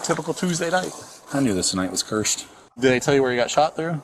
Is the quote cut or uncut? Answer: cut